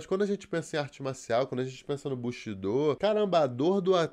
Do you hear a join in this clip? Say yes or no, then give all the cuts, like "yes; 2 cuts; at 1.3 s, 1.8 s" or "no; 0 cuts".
yes; 1 cut; at 3.0 s